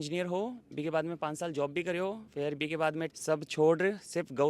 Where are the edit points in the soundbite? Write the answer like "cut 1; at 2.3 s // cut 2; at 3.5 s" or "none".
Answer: cut 1; at 2.2 s // cut 2; at 3.1 s